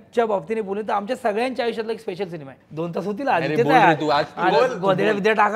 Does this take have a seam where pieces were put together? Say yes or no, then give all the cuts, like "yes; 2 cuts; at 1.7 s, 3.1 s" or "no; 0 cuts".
yes; 1 cut; at 2.6 s